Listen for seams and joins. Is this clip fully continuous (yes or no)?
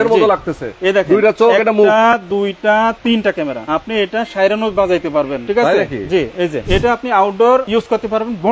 no